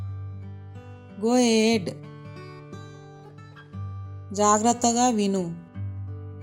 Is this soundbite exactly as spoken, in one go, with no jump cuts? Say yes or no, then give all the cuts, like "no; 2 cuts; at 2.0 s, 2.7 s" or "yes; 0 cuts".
no; 3 cuts; at 1.0 s, 2.2 s, 4.1 s